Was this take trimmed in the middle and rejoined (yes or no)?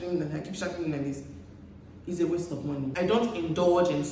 yes